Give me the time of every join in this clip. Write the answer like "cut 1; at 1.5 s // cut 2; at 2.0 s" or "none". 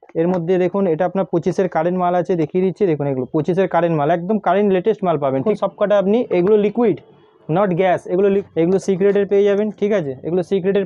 cut 1; at 5.5 s // cut 2; at 8.4 s